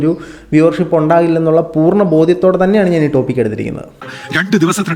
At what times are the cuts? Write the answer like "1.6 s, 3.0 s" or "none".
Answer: 4.0 s